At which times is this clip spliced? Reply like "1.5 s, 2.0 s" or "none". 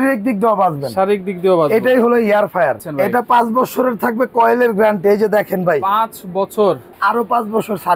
2.8 s, 6.9 s